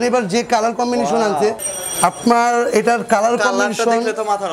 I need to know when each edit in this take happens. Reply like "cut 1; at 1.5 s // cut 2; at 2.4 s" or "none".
cut 1; at 1.7 s